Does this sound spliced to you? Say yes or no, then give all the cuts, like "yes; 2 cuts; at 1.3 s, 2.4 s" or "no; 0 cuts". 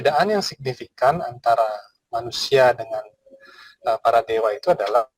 no; 0 cuts